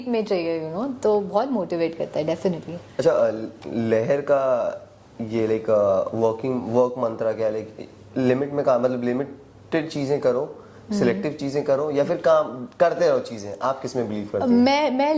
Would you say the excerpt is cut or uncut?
uncut